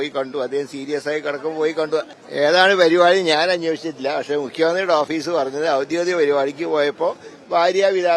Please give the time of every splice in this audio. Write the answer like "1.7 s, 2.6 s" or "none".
2.2 s